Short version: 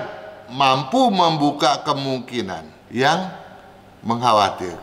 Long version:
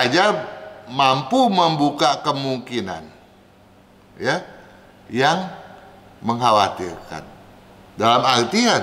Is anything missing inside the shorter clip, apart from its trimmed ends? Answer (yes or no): yes